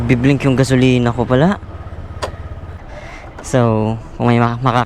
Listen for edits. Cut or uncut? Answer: cut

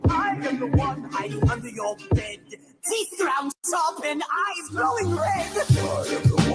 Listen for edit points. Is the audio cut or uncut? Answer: uncut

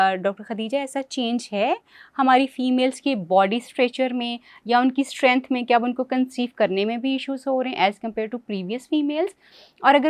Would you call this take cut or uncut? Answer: uncut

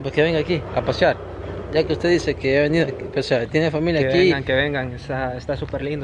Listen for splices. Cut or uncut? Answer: uncut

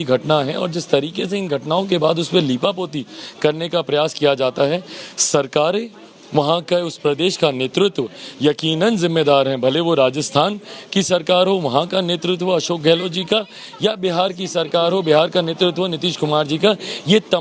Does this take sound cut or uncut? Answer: uncut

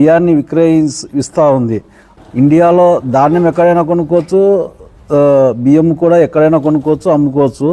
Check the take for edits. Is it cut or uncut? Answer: cut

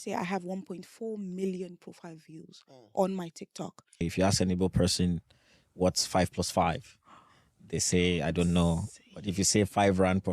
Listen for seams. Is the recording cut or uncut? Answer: cut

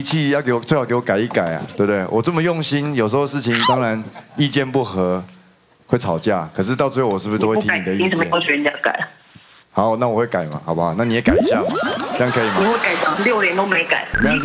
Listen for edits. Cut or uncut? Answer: uncut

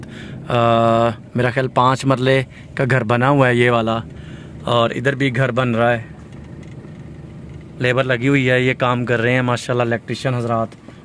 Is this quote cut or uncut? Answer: uncut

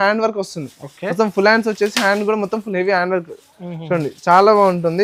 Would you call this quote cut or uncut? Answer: uncut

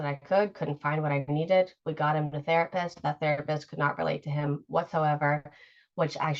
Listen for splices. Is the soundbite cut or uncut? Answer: uncut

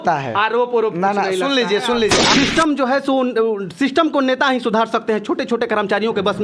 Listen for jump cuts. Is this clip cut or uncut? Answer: cut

